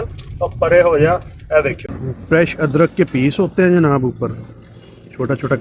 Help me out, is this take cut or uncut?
cut